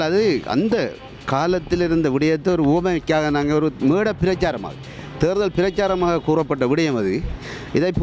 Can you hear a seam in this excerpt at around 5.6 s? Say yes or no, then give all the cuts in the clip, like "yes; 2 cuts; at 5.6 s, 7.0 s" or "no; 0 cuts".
no; 0 cuts